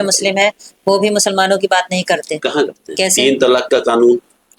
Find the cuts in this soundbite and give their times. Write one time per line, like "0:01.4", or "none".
0:02.9